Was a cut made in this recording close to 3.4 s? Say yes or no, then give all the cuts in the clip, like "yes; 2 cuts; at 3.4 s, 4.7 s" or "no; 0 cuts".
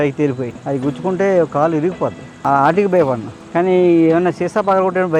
no; 0 cuts